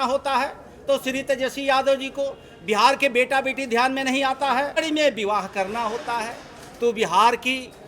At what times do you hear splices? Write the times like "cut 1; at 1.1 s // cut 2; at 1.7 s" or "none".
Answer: cut 1; at 4.8 s